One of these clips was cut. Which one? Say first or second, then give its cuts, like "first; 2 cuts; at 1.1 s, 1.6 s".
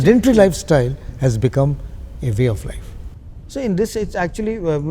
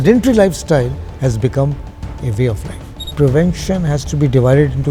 second; 1 cut; at 3.1 s